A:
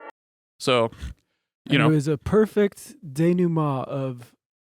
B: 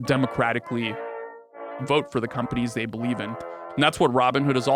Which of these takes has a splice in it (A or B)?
A